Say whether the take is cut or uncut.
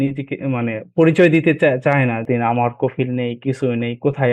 cut